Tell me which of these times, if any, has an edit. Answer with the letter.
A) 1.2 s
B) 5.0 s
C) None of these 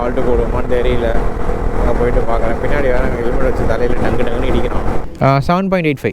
B